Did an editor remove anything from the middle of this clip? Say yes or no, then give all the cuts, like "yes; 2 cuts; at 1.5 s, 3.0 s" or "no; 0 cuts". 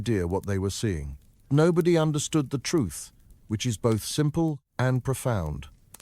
yes; 1 cut; at 1.5 s